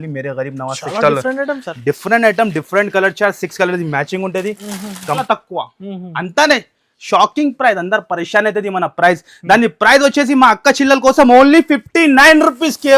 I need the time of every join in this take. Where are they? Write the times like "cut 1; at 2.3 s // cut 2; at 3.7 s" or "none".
cut 1; at 5.2 s